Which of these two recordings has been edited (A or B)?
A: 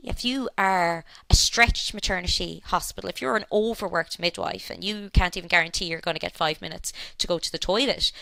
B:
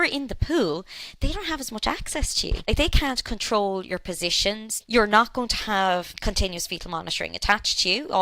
B